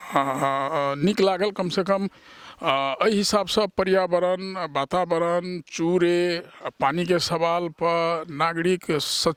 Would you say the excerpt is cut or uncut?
uncut